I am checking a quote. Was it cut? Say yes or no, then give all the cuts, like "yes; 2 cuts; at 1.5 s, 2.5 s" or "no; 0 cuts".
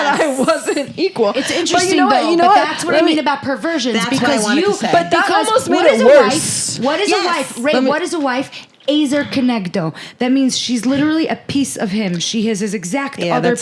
no; 0 cuts